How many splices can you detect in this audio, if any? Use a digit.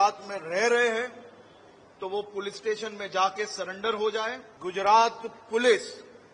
1